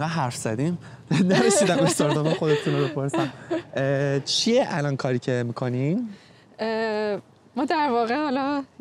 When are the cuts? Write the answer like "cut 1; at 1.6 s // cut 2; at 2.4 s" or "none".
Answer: none